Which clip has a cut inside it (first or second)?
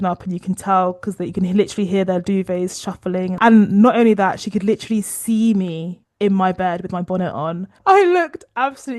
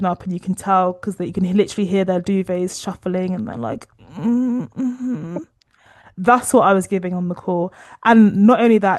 first